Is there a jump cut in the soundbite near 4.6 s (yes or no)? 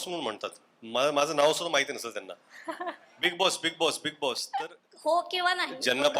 yes